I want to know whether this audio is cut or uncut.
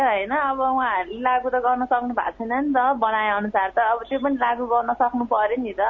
uncut